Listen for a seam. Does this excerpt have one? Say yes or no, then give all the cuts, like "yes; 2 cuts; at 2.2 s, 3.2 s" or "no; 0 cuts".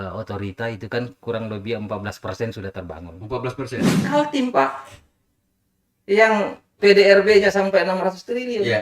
yes; 1 cut; at 3.9 s